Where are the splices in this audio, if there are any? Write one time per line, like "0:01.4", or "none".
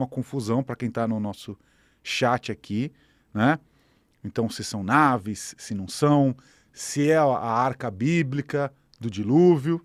none